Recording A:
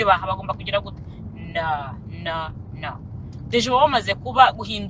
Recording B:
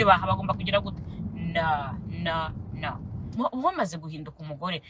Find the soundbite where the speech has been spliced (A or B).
B